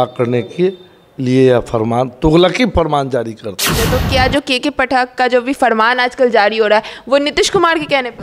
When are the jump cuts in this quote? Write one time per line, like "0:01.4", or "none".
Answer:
0:03.9